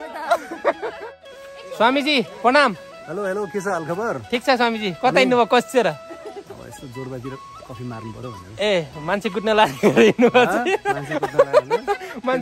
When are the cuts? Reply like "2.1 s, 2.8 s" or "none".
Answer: 1.0 s